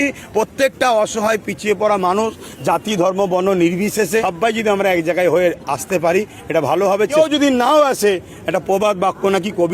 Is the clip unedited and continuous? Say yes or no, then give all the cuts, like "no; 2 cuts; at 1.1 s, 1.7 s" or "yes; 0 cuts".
no; 2 cuts; at 4.2 s, 7.1 s